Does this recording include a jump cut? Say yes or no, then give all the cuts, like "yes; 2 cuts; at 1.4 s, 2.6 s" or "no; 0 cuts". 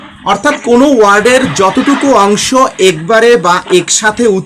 no; 0 cuts